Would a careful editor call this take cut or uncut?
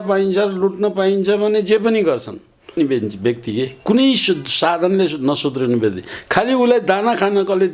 cut